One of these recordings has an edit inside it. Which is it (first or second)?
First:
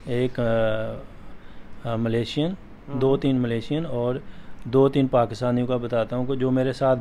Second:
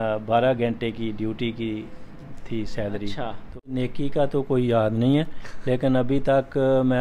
second